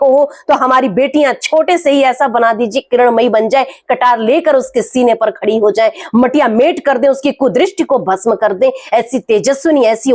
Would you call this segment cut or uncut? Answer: uncut